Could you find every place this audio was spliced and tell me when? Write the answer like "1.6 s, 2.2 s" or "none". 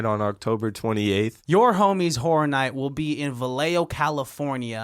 1.4 s